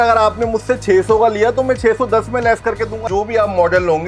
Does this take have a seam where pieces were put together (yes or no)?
yes